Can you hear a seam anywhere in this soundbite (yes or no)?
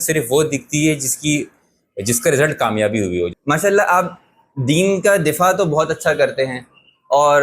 yes